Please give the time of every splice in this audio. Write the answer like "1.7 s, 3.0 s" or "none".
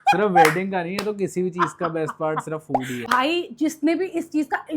3.0 s